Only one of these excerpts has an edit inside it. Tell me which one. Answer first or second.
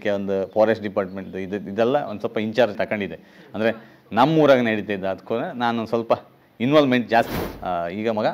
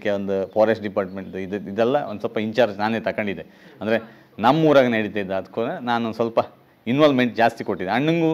first